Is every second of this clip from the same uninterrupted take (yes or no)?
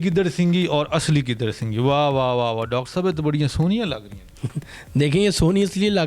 yes